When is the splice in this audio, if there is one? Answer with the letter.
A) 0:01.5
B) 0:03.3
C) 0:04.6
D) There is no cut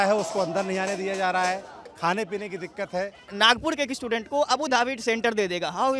B